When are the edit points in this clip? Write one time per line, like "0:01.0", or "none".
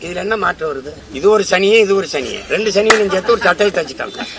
0:01.0